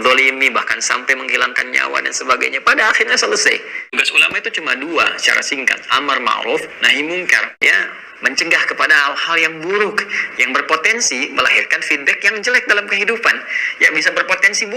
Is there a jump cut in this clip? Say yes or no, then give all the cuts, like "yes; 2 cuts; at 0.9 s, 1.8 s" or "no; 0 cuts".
yes; 2 cuts; at 3.8 s, 7.5 s